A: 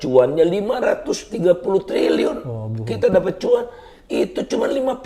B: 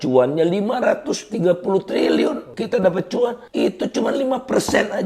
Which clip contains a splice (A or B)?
B